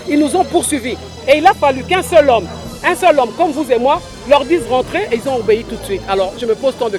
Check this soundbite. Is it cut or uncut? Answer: uncut